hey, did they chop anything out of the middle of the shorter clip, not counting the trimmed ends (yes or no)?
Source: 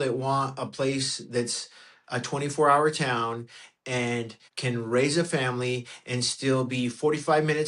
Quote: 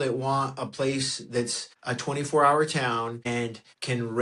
yes